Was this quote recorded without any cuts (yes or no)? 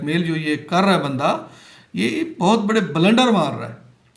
yes